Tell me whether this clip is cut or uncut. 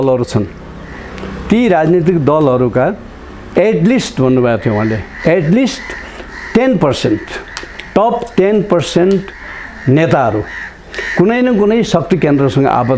uncut